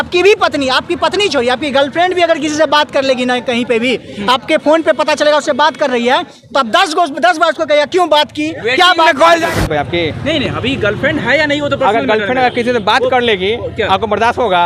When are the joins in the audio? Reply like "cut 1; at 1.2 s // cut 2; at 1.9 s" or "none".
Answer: cut 1; at 9.5 s